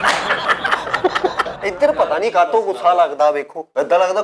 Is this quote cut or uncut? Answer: cut